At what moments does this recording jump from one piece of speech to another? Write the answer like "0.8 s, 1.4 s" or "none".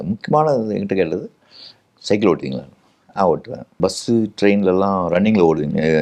3.8 s